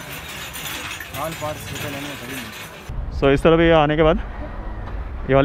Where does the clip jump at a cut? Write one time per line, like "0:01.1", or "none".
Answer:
0:03.0